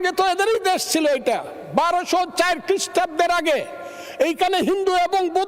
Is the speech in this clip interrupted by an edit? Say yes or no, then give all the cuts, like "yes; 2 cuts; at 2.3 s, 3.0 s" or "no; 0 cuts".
no; 0 cuts